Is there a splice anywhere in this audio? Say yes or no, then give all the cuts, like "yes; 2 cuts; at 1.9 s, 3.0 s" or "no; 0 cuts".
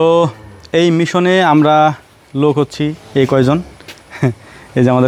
no; 0 cuts